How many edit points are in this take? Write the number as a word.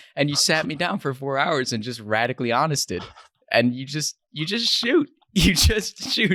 zero